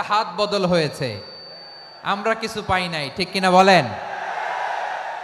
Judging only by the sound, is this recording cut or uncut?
uncut